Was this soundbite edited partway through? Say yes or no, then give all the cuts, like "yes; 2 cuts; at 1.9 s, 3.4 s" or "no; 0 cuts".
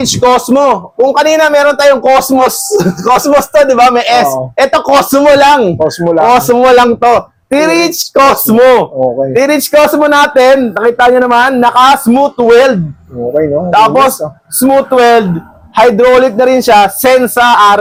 no; 0 cuts